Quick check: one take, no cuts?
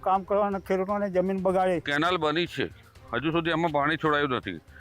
no; 1 cut; at 1.9 s

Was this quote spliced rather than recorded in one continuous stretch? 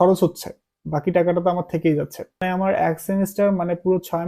yes; 1 cut; at 2.3 s

